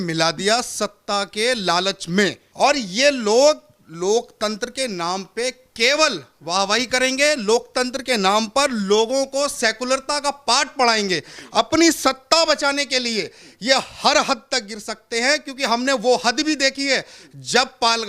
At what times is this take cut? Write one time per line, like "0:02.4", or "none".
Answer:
0:02.4